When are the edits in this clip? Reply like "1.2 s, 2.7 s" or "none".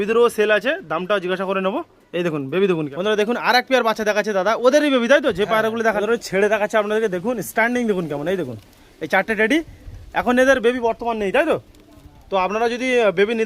2.9 s, 6.0 s